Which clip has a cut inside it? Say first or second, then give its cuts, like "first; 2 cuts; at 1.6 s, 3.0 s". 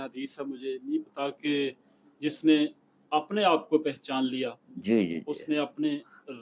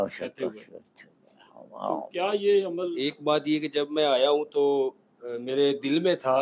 second; 1 cut; at 2.9 s